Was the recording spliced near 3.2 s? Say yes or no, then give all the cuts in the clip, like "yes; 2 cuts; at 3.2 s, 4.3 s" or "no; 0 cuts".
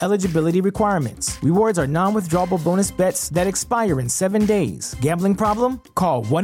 no; 0 cuts